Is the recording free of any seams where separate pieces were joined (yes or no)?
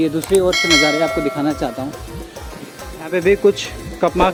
yes